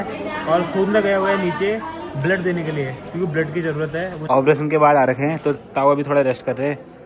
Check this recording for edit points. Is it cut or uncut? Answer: cut